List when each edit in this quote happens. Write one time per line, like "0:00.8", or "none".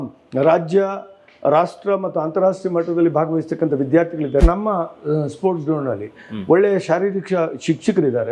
0:04.4